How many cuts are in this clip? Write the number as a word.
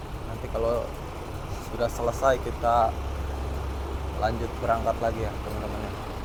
zero